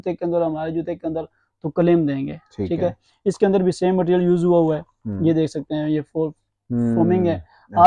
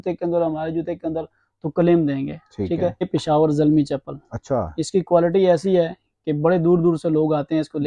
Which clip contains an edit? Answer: second; 1 cut; at 3.0 s

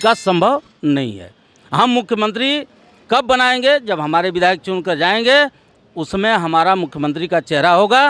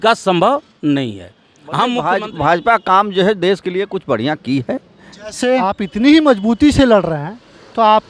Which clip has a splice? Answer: second; 2 cuts; at 2.0 s, 5.8 s

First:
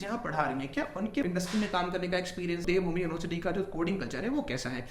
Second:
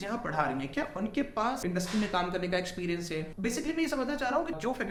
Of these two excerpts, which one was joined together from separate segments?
first; 2 cuts; at 1.2 s, 2.6 s

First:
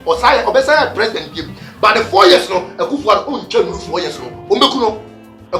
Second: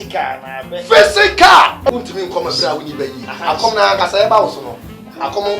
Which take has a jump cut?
second; 1 cut; at 1.9 s

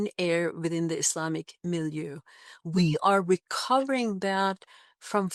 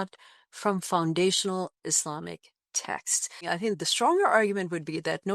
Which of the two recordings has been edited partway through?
second; 1 cut; at 3.5 s

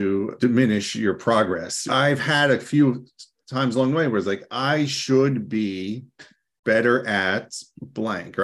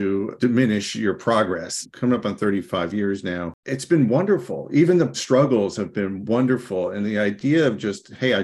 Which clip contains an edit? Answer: second; 1 cut; at 1.8 s

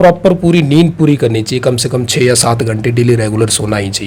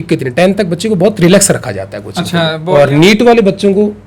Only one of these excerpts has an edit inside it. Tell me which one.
second; 1 cut; at 2.6 s

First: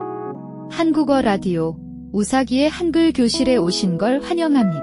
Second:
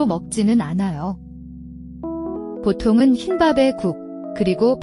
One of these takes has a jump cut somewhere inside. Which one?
second; 2 cuts; at 1.0 s, 2.6 s

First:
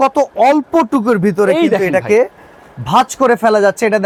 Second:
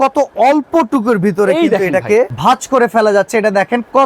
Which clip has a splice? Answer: second; 1 cut; at 2.3 s

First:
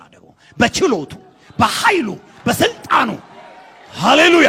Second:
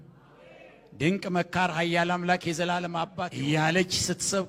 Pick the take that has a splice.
second; 1 cut; at 3.1 s

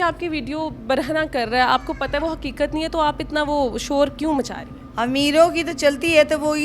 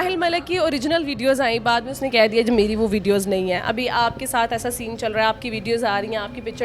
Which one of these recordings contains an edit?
first; 1 cut; at 4.8 s

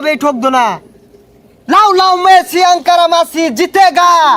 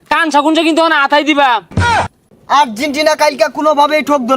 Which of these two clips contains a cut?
second; 1 cut; at 2.1 s

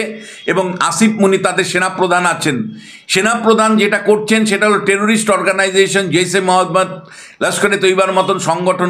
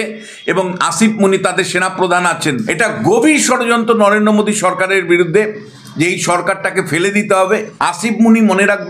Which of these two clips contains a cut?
second; 2 cuts; at 2.7 s, 7.7 s

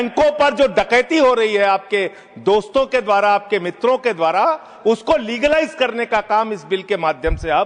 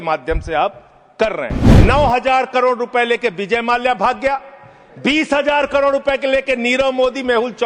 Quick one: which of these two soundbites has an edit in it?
second; 1 cut; at 1.6 s

